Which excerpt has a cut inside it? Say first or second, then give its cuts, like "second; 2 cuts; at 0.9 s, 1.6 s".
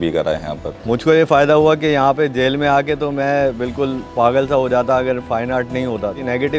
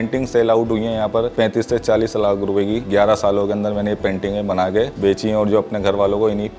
second; 3 cuts; at 1.3 s, 2.8 s, 4.9 s